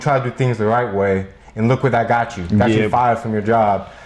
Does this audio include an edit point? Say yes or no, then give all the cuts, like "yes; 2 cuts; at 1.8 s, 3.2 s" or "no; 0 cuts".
no; 0 cuts